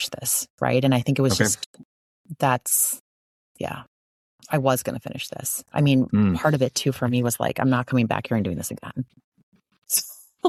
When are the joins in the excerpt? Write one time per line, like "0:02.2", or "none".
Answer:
none